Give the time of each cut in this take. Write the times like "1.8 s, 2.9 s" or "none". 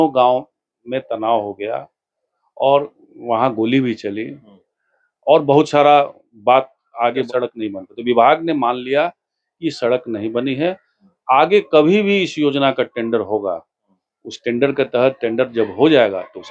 7.3 s